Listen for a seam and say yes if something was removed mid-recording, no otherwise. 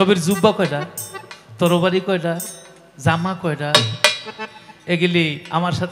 no